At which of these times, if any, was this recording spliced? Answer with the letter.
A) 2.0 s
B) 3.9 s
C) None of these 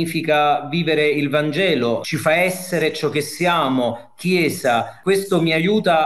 A